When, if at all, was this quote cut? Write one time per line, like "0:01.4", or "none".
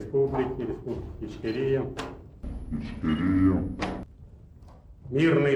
none